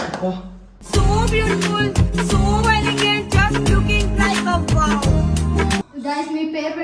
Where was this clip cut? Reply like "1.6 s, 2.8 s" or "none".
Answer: 5.9 s